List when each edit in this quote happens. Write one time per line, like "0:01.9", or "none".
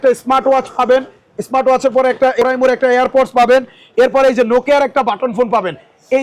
0:02.4